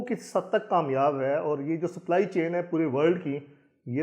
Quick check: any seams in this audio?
no; 0 cuts

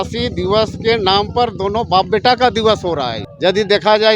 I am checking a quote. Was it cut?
yes; 1 cut; at 3.2 s

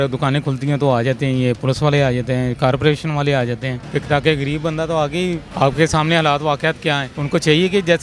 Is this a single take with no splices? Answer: no; 3 cuts; at 3.7 s, 5.5 s, 7.1 s

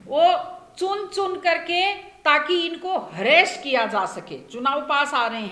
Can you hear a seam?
no; 0 cuts

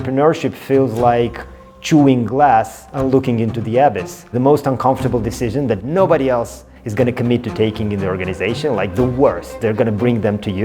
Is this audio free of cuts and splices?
no; 1 cut; at 4.2 s

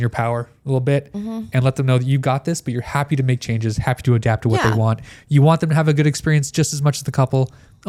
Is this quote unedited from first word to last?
yes; 0 cuts

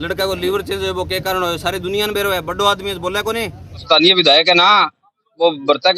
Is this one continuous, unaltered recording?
no; 1 cut; at 3.8 s

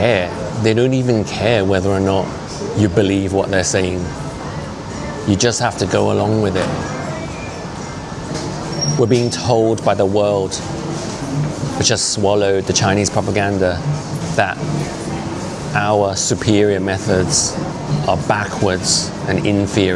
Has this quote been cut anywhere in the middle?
yes; 3 cuts; at 8.3 s, 14.2 s, 17.7 s

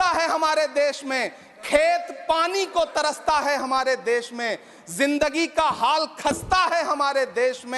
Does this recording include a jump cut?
no; 0 cuts

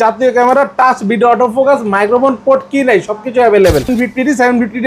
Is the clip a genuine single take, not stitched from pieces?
no; 1 cut; at 3.9 s

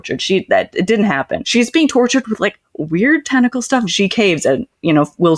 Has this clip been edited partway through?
yes; 2 cuts; at 1.4 s, 3.9 s

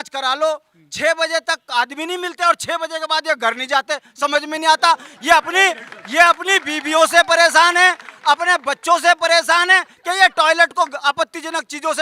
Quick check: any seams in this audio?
no; 0 cuts

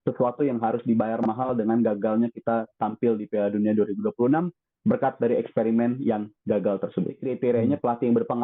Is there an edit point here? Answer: yes; 1 cut; at 7.2 s

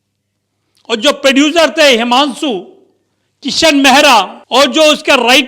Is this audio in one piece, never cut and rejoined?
no; 1 cut; at 4.4 s

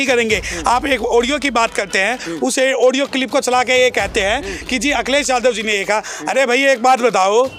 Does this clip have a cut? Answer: no; 0 cuts

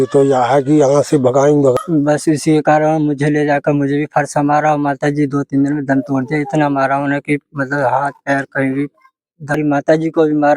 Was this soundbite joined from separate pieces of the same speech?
yes; 2 cuts; at 1.8 s, 9.6 s

